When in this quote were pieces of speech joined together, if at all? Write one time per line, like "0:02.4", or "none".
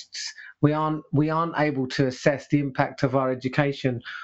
none

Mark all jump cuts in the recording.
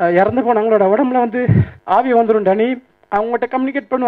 0:01.7

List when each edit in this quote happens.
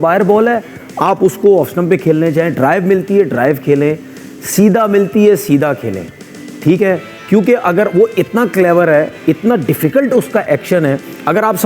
none

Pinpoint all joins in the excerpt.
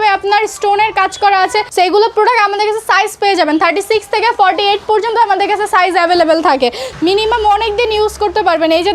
0:01.7
0:06.9

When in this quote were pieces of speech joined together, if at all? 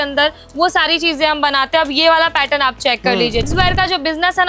0:03.4

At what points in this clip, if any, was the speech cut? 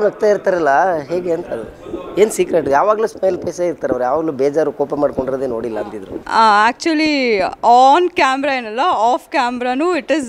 none

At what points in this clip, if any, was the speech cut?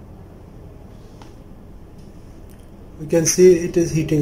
none

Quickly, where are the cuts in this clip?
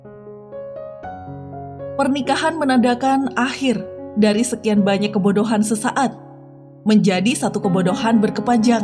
0:02.0

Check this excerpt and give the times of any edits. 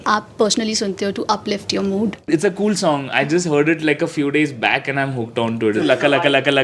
0:02.3
0:05.8

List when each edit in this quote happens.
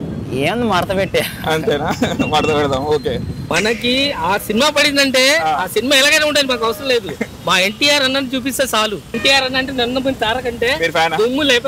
0:03.5
0:09.0

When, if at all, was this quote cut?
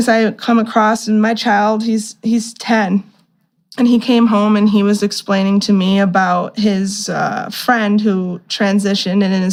none

